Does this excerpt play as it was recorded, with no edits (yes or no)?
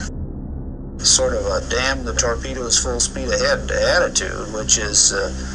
no